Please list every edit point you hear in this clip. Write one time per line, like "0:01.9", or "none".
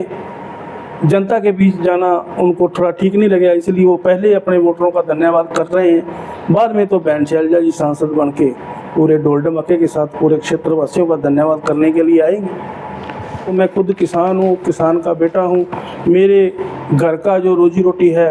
0:13.5